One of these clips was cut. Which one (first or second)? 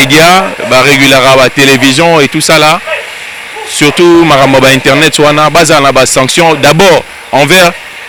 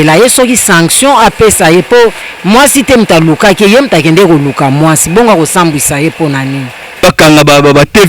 second